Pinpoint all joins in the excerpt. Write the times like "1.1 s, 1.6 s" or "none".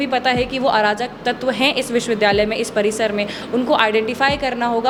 none